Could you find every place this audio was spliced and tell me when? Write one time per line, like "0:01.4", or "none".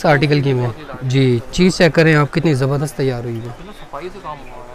none